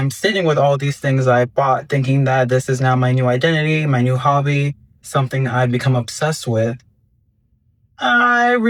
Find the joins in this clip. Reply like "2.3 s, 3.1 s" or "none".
none